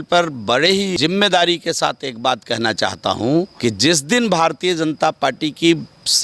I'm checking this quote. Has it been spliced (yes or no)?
yes